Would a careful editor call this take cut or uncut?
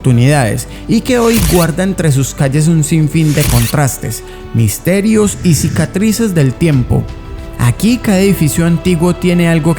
uncut